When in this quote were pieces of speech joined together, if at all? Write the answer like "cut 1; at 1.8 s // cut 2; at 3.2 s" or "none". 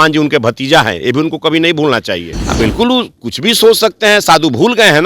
cut 1; at 2.4 s